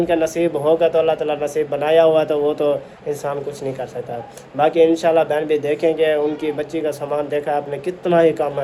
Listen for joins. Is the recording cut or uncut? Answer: uncut